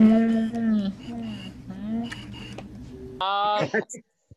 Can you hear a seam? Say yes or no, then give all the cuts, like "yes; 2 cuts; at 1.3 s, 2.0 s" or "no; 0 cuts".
yes; 1 cut; at 3.2 s